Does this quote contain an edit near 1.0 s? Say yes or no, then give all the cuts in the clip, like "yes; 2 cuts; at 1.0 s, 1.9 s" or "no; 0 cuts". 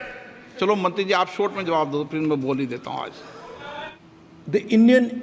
no; 1 cut; at 3.9 s